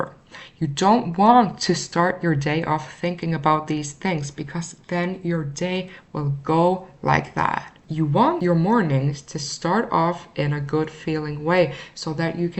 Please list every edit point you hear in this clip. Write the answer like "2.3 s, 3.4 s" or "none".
8.3 s

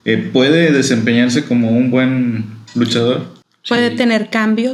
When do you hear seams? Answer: none

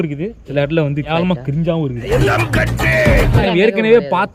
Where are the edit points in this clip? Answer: 2.2 s, 3.4 s

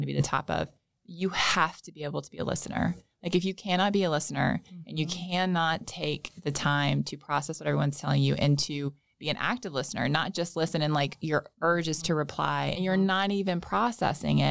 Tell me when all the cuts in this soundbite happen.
12.7 s

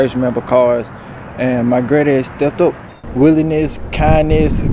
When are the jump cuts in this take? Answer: 3.0 s

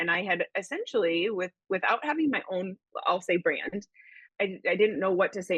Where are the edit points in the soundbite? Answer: 4.2 s

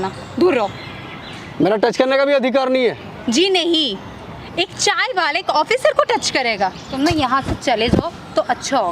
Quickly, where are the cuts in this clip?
6.8 s

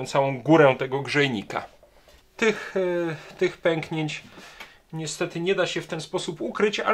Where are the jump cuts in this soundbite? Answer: 2.2 s

